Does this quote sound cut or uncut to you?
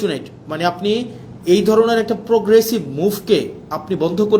uncut